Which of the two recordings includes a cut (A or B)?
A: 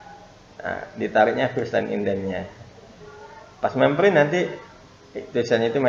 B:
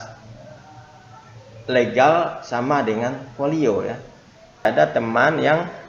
B